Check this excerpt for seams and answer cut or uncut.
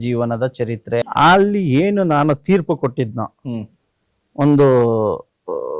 cut